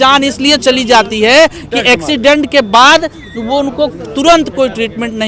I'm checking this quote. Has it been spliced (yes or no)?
no